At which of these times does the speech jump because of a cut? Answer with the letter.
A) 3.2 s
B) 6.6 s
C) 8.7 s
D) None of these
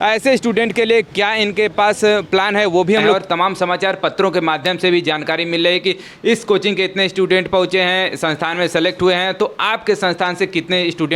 A